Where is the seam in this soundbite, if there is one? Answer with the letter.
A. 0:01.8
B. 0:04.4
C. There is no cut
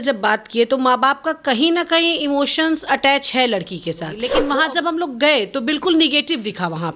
B